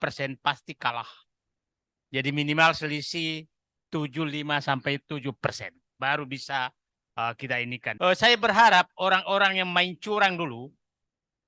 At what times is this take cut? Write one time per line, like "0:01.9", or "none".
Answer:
0:07.8